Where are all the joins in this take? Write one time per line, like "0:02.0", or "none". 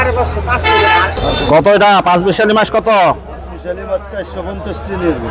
0:01.2